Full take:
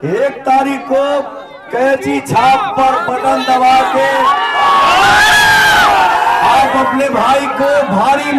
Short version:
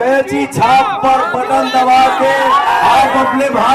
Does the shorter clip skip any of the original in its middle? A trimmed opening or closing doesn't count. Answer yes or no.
yes